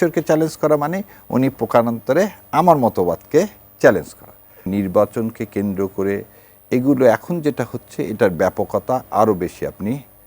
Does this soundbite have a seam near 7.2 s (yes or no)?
no